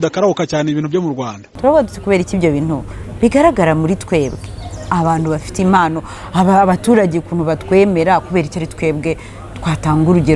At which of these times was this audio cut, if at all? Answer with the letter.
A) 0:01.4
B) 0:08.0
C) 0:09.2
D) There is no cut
A